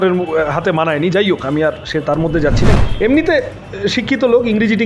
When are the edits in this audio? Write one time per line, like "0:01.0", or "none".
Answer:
0:02.7